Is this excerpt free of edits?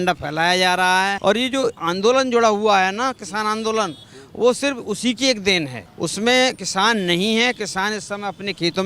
no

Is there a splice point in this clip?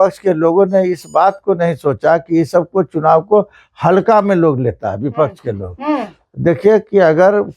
no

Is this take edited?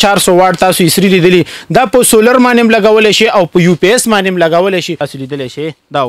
yes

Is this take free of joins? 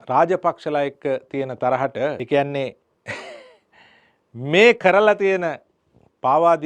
no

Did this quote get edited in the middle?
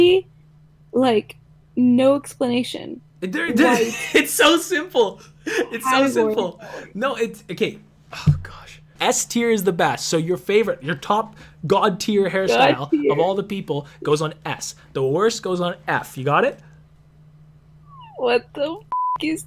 no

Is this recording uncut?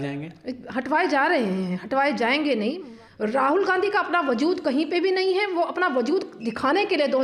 no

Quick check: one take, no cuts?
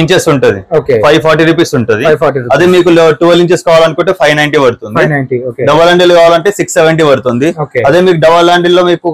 yes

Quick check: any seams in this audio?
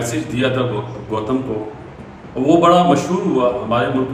no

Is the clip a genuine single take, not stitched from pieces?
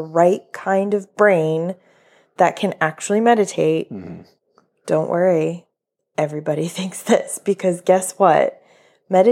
yes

